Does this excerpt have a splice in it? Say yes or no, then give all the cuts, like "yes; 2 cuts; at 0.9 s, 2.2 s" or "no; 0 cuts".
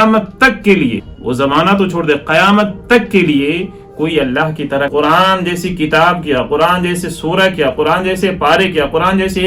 yes; 2 cuts; at 1.1 s, 4.9 s